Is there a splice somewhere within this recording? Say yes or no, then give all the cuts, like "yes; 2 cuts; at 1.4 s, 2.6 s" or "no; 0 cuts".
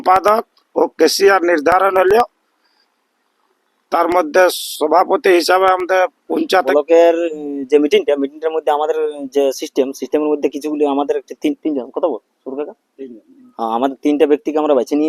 yes; 1 cut; at 6.7 s